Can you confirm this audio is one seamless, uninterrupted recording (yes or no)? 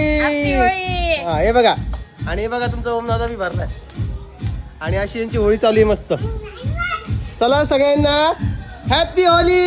yes